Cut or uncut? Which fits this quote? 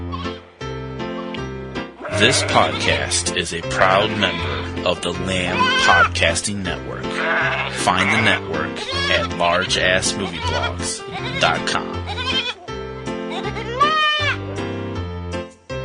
uncut